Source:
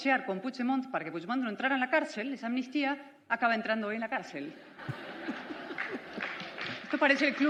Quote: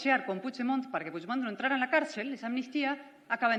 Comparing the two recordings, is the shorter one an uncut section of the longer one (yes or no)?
yes